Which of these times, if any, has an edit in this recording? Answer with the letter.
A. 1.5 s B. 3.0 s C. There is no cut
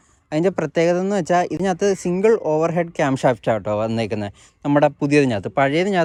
C